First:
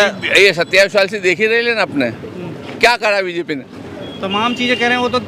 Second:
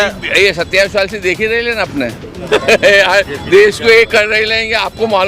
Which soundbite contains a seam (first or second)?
second